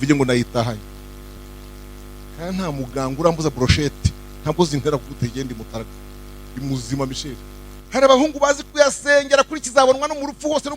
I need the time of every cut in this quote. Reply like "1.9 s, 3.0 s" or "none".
1.4 s, 7.8 s